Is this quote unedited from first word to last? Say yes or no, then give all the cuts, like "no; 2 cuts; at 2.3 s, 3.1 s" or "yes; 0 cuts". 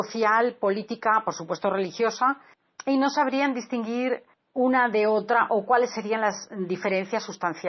no; 1 cut; at 4.6 s